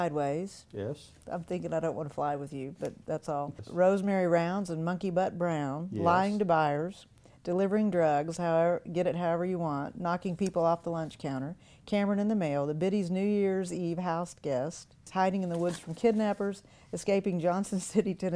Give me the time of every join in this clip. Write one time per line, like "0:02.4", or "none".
0:03.6
0:15.1